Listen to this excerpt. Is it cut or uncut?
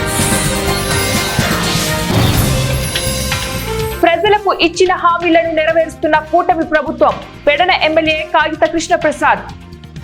uncut